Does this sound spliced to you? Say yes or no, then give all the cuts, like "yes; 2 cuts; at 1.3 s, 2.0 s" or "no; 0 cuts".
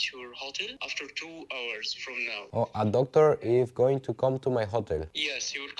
no; 0 cuts